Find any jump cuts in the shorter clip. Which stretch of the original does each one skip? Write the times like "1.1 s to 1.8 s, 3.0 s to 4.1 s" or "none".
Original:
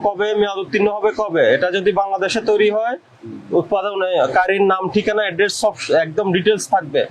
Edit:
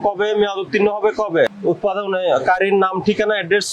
1.5 s to 3.3 s